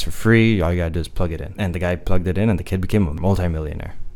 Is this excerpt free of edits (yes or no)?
no